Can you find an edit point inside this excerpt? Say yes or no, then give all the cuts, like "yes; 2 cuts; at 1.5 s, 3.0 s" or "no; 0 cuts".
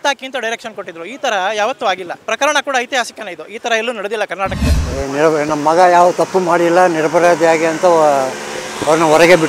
yes; 2 cuts; at 2.1 s, 4.7 s